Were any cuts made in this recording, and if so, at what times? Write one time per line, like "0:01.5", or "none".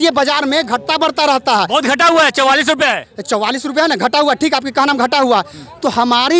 none